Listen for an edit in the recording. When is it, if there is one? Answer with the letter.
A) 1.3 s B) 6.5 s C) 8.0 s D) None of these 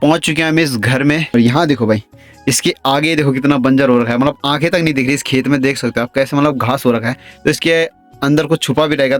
A